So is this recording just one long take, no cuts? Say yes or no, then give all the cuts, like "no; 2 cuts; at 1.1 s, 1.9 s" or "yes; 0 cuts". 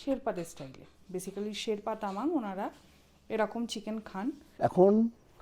no; 1 cut; at 4.5 s